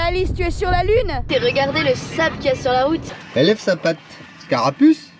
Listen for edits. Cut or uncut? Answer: cut